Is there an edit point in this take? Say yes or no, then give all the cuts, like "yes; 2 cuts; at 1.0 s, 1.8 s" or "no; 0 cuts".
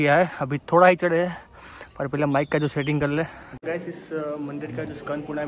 yes; 1 cut; at 3.5 s